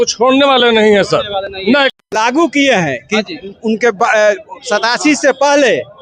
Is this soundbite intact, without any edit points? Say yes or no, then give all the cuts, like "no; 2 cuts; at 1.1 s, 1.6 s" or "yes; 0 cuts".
yes; 0 cuts